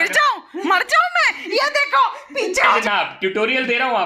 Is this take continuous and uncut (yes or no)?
no